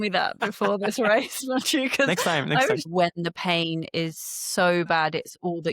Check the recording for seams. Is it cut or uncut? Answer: cut